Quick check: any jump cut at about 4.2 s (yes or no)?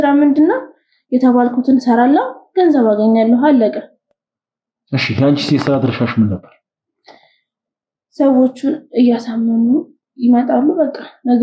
no